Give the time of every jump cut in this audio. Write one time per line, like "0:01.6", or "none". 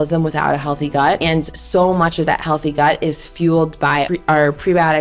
0:01.2
0:04.1